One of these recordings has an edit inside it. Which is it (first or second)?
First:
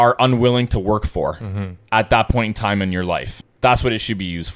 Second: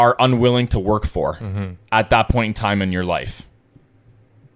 first